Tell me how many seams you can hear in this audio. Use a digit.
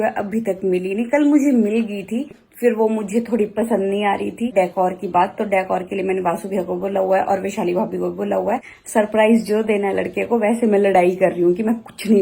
3